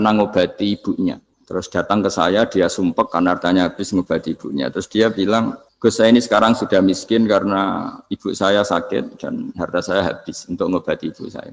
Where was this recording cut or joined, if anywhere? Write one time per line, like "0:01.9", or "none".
0:01.3
0:05.6